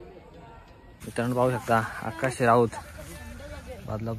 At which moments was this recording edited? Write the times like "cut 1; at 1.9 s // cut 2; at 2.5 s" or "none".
cut 1; at 1.0 s

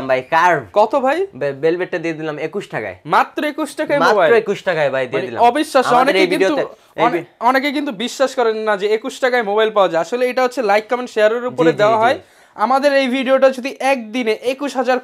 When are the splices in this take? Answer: none

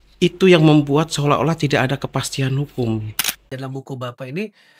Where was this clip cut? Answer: cut 1; at 3.5 s

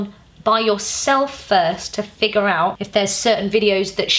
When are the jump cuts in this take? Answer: cut 1; at 2.8 s

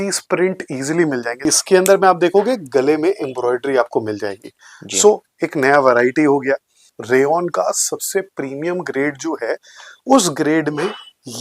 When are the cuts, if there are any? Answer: cut 1; at 1.5 s // cut 2; at 7.0 s

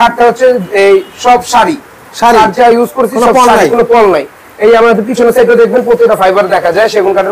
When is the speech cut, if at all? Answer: none

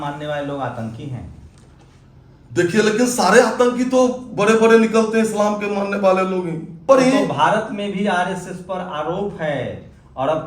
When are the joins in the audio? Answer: cut 1; at 6.9 s

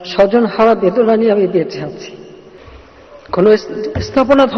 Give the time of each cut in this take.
cut 1; at 2.6 s

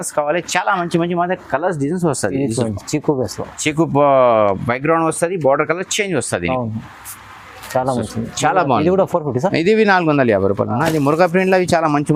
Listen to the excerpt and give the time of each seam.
none

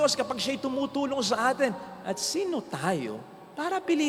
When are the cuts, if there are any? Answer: none

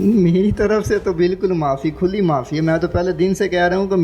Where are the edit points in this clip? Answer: none

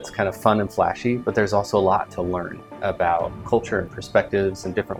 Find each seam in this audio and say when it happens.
none

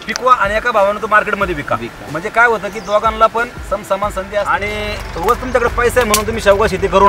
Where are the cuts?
cut 1; at 4.5 s

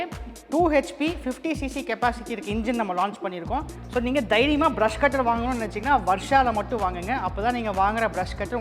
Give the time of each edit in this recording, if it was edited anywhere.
cut 1; at 3.8 s

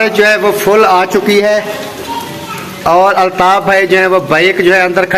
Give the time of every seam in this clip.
none

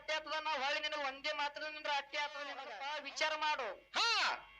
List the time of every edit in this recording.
cut 1; at 2.7 s

